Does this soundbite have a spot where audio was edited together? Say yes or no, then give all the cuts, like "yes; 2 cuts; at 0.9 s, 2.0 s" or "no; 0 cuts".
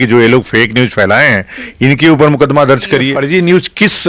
yes; 1 cut; at 3.2 s